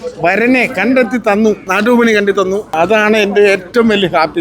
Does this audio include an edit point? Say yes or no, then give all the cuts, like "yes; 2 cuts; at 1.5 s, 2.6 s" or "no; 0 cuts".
yes; 2 cuts; at 1.7 s, 2.7 s